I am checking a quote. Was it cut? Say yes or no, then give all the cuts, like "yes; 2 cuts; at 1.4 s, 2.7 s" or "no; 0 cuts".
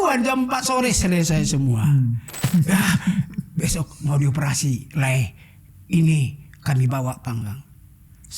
yes; 1 cut; at 2.5 s